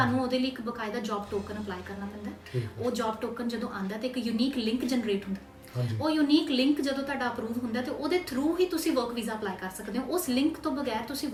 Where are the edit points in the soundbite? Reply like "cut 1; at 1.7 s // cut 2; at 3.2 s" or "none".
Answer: none